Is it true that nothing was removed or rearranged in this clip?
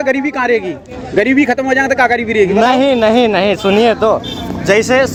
yes; 0 cuts

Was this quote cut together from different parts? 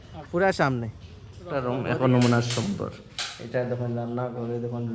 yes; 1 cut; at 1.6 s

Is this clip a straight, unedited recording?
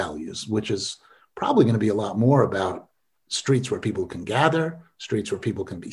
yes; 0 cuts

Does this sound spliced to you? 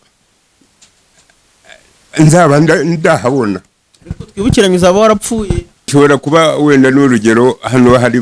yes; 1 cut; at 5.9 s

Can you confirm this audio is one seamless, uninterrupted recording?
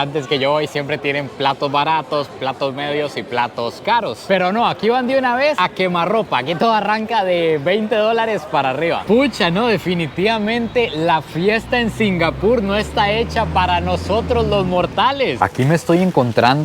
no; 2 cuts; at 9.0 s, 15.4 s

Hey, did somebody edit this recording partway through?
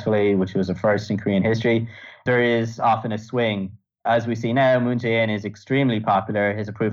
yes; 2 cuts; at 2.1 s, 3.9 s

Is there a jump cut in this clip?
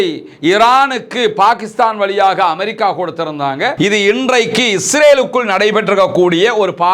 yes; 1 cut; at 3.7 s

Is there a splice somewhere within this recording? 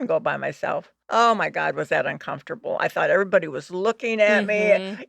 yes; 1 cut; at 0.9 s

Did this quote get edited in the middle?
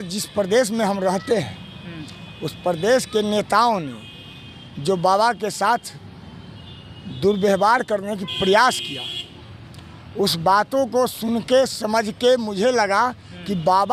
no; 0 cuts

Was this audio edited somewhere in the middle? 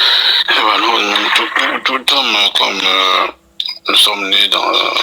no; 0 cuts

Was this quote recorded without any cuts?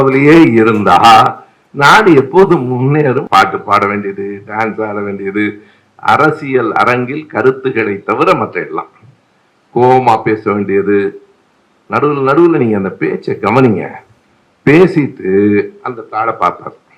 no; 1 cut; at 3.2 s

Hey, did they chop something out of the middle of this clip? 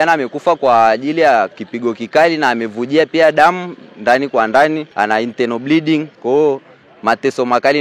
yes; 3 cuts; at 1.6 s, 4.9 s, 6.1 s

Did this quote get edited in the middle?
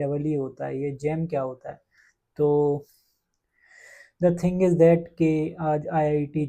no; 0 cuts

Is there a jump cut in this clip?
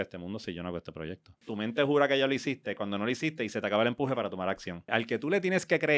yes; 2 cuts; at 1.4 s, 4.9 s

